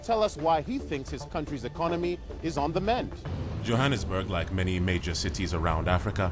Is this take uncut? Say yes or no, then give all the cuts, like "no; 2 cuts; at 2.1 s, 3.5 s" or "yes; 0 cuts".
yes; 0 cuts